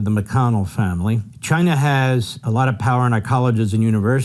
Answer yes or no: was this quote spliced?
yes